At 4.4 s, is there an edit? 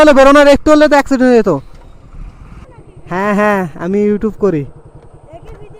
no; 1 cut; at 2.6 s

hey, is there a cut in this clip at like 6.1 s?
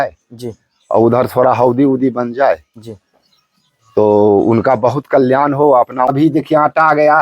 yes; 1 cut; at 6.1 s

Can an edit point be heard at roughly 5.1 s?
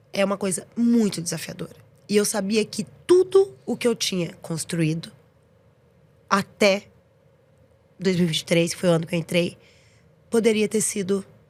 no; 0 cuts

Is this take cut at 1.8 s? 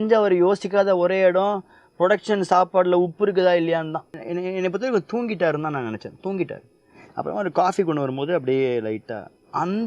no; 1 cut; at 4.1 s

